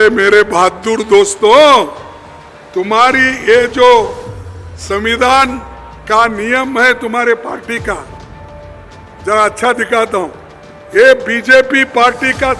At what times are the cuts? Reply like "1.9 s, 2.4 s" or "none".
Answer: none